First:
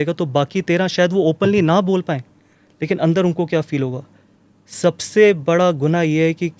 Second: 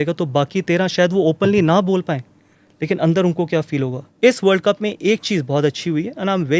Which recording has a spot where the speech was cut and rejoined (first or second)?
second